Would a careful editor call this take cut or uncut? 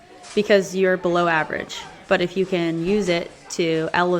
uncut